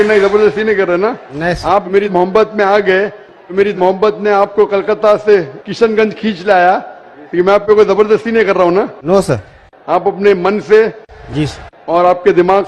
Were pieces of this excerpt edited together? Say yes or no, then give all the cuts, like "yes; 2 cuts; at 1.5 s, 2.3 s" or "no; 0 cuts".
no; 0 cuts